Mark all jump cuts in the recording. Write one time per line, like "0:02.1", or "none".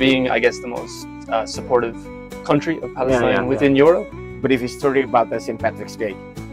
0:04.1